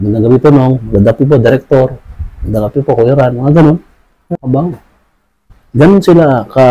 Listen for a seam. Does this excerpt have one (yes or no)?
no